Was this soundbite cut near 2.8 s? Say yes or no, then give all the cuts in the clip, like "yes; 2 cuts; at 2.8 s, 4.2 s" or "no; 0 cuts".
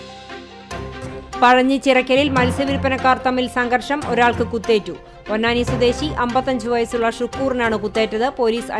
no; 1 cut; at 1.1 s